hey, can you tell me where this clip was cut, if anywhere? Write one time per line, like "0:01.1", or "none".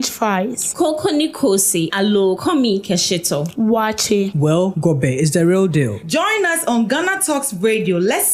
none